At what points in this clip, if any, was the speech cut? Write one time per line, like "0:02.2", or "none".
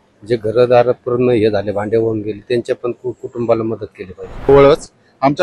0:04.5